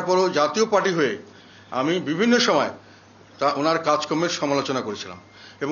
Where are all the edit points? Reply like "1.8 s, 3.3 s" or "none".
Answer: none